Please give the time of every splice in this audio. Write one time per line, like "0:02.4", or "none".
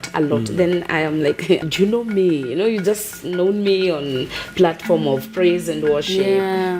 0:01.6